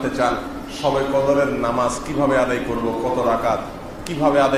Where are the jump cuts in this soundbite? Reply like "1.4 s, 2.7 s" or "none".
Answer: none